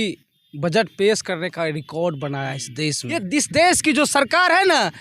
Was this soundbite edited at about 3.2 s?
yes; 1 cut; at 3.2 s

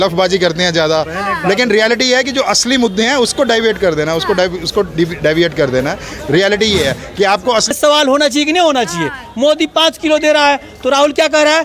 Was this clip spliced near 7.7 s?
yes; 1 cut; at 7.7 s

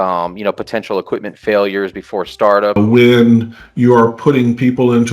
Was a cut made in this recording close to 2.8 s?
yes; 1 cut; at 2.8 s

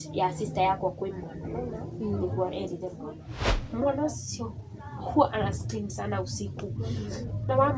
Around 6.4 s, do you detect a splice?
no; 1 cut; at 3.3 s

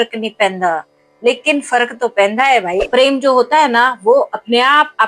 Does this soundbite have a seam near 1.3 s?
no; 1 cut; at 2.8 s

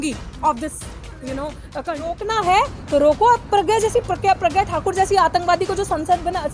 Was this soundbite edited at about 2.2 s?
yes; 1 cut; at 2.2 s

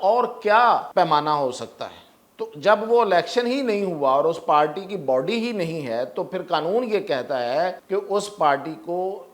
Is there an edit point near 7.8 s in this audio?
yes; 2 cuts; at 0.9 s, 7.8 s

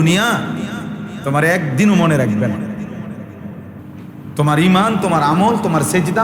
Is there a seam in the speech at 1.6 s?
no; 1 cut; at 3.8 s

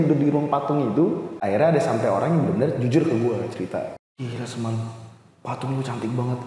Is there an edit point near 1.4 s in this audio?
yes; 2 cuts; at 1.4 s, 3.9 s

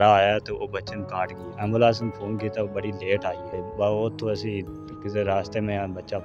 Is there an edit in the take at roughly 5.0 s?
no; 2 cuts; at 1.4 s, 3.5 s

